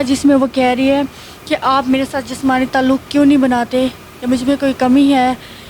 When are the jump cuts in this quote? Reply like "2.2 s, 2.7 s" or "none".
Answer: none

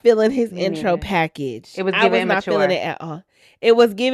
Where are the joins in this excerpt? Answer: none

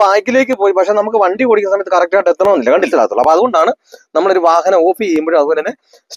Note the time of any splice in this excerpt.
2.9 s

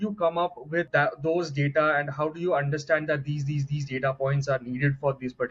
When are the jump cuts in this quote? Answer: none

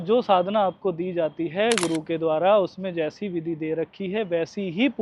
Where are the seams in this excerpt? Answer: none

